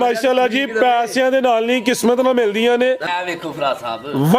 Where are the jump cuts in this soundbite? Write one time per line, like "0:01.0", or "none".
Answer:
0:03.1